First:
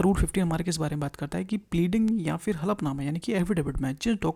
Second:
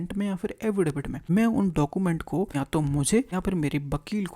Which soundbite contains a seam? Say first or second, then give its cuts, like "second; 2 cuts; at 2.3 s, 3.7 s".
second; 3 cuts; at 1.1 s, 2.5 s, 3.3 s